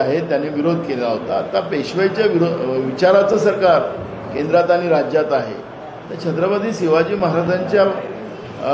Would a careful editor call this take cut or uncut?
uncut